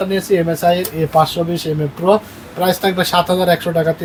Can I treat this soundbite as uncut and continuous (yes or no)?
yes